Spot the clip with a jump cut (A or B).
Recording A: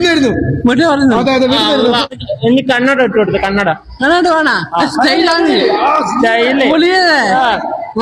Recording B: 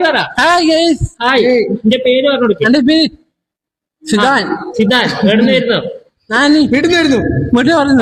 A